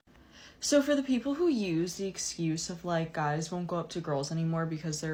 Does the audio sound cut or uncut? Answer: uncut